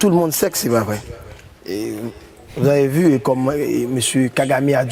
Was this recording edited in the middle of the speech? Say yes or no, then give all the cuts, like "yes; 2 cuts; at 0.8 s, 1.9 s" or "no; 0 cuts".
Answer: no; 0 cuts